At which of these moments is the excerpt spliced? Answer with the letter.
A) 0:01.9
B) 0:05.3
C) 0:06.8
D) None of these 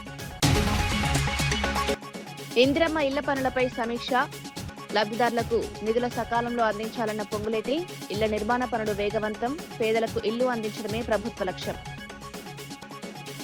A